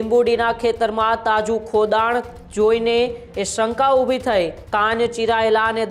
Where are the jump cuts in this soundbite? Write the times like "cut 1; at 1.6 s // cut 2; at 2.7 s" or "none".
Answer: cut 1; at 4.6 s